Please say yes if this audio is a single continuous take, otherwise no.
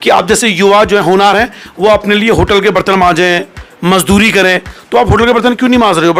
yes